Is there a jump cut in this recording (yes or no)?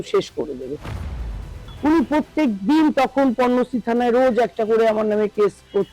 yes